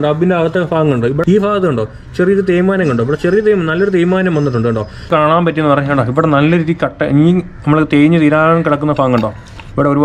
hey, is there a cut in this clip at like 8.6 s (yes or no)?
no